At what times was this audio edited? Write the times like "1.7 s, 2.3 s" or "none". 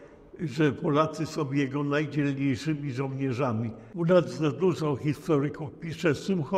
3.8 s